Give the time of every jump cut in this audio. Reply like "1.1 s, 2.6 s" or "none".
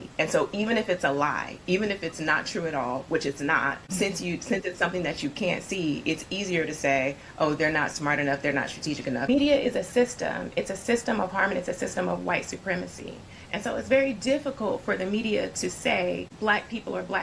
none

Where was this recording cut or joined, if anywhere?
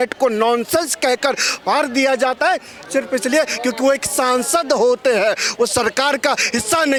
none

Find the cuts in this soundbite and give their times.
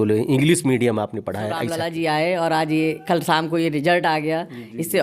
1.6 s

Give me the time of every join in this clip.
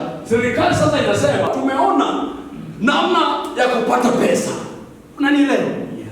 1.5 s

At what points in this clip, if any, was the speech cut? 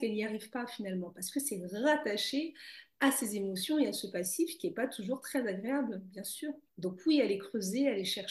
6.7 s

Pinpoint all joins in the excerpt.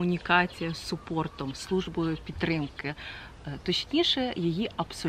none

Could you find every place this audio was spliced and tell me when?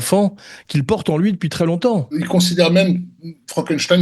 2.2 s

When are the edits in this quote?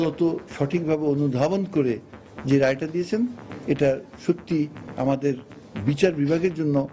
none

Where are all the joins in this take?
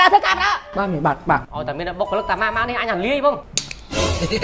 1.5 s, 3.4 s

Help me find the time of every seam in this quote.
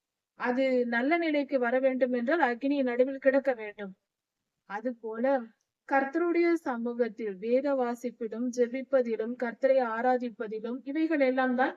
10.8 s

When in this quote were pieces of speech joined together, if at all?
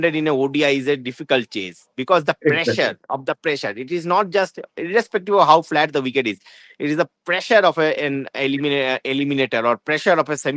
none

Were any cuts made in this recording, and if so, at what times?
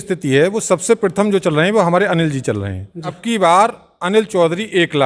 3.2 s

